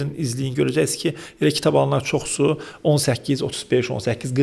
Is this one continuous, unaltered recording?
yes; 0 cuts

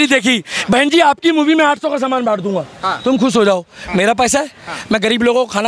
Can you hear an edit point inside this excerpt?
no; 0 cuts

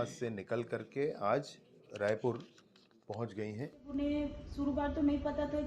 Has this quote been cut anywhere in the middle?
yes; 1 cut; at 3.9 s

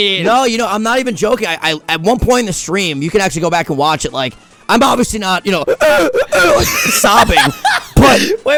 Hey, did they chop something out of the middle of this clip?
no; 0 cuts

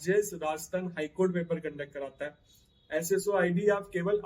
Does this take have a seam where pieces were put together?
no; 0 cuts

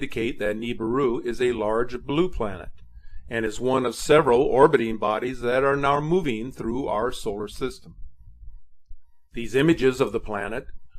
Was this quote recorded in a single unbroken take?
no; 1 cut; at 5.9 s

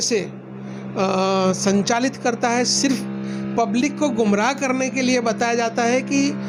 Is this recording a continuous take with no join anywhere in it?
yes; 0 cuts

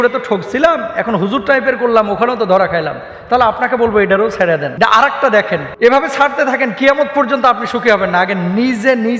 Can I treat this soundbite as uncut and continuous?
no; 2 cuts; at 4.7 s, 5.7 s

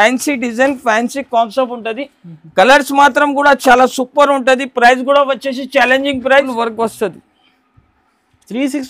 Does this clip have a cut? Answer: yes; 1 cut; at 6.5 s

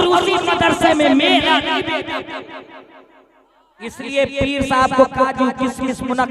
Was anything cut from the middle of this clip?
yes; 1 cut; at 3.8 s

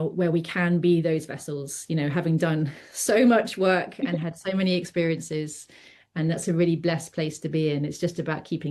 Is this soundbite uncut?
yes; 0 cuts

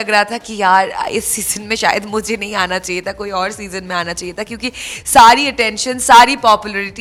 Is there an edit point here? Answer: no; 0 cuts

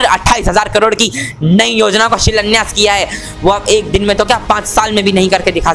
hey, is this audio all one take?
yes; 0 cuts

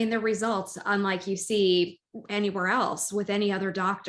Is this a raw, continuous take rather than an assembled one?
yes; 0 cuts

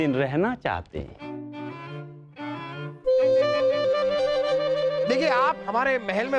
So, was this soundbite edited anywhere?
no; 0 cuts

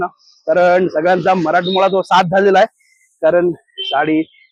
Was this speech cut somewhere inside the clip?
no; 0 cuts

